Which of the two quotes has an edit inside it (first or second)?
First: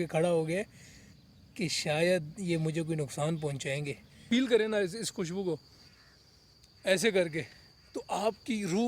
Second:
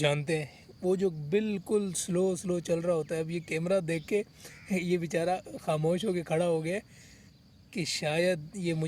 first